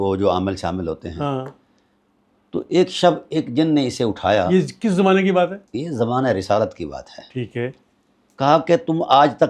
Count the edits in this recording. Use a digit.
0